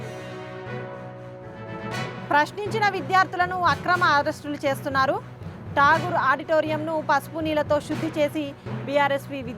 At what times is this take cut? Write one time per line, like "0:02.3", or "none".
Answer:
0:02.0